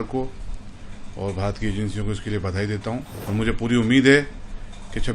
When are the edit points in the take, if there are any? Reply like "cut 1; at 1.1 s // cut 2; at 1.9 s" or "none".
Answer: cut 1; at 3.1 s